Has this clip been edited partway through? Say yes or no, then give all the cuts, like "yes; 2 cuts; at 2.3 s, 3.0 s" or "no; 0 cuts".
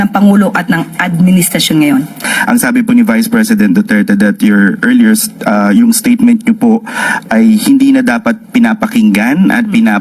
yes; 1 cut; at 2.3 s